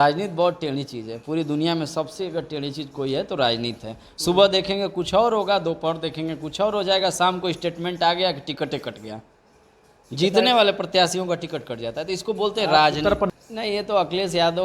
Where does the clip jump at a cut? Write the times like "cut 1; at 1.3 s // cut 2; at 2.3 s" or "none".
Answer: cut 1; at 13.3 s